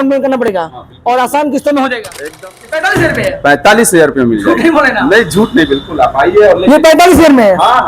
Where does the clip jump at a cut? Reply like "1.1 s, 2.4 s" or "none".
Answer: 2.3 s